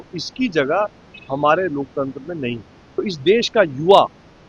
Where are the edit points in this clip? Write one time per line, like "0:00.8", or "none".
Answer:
0:03.0